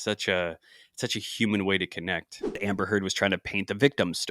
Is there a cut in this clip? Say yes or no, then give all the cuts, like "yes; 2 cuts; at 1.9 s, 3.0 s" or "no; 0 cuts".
yes; 1 cut; at 2.6 s